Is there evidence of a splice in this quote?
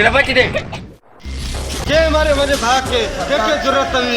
yes; 1 cut; at 0.9 s

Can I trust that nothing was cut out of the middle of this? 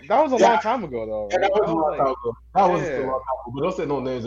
yes; 0 cuts

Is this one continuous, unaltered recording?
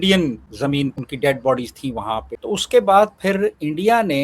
no; 2 cuts; at 1.0 s, 2.3 s

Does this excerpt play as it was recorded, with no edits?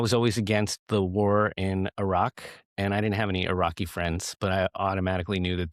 yes; 0 cuts

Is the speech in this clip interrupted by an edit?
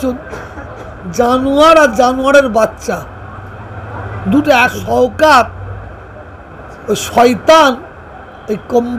yes; 1 cut; at 4.8 s

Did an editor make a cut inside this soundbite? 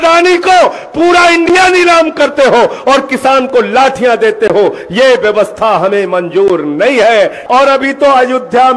yes; 1 cut; at 7.4 s

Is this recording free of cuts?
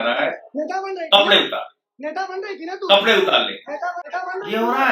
no; 1 cut; at 4.0 s

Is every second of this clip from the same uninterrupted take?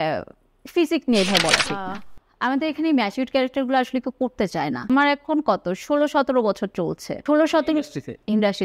no; 3 cuts; at 1.9 s, 4.9 s, 7.1 s

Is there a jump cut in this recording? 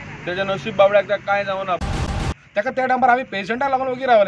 yes; 1 cut; at 1.9 s

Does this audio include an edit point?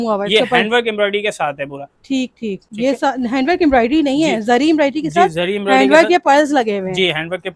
no; 0 cuts

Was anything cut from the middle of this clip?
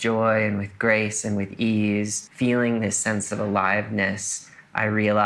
yes; 1 cut; at 2.2 s

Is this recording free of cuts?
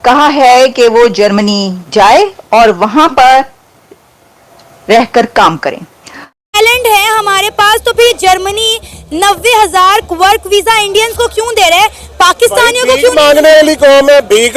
no; 1 cut; at 6.5 s

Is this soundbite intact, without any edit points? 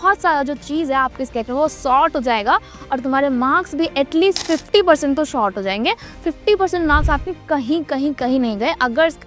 yes; 0 cuts

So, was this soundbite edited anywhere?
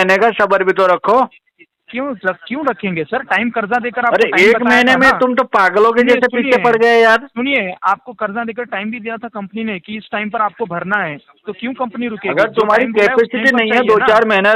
no; 0 cuts

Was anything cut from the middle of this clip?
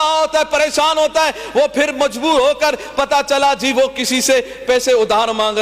no; 0 cuts

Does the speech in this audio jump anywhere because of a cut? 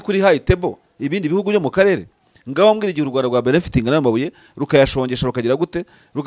no; 0 cuts

